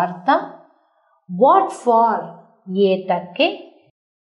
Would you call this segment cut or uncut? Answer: uncut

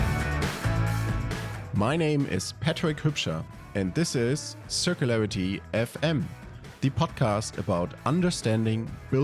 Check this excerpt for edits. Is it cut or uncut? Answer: cut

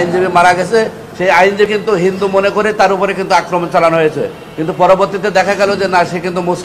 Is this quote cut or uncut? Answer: cut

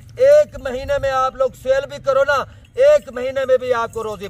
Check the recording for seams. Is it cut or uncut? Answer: uncut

